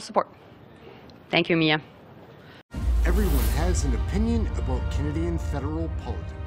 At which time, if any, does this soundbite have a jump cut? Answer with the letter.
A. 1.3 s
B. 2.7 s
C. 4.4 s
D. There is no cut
B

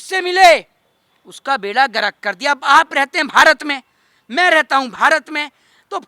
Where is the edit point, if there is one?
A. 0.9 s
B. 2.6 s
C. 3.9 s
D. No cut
D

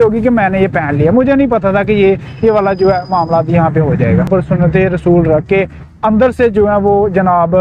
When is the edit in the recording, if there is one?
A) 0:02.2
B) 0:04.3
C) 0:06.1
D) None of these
B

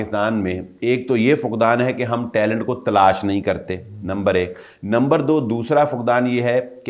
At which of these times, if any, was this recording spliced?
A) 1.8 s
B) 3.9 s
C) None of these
C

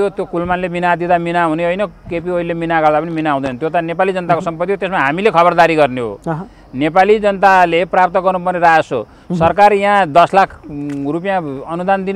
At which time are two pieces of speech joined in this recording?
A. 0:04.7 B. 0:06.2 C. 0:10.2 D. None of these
D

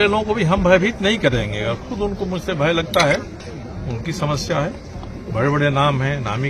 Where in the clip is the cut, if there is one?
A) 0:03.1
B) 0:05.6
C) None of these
C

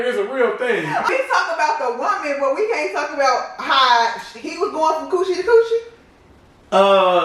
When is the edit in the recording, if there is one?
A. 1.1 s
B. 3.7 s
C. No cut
A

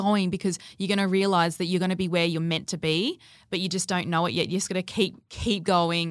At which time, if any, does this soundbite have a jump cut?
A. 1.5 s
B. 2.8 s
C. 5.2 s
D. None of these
D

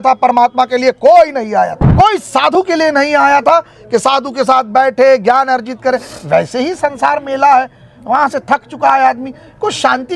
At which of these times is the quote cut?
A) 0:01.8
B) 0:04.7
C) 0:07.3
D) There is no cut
A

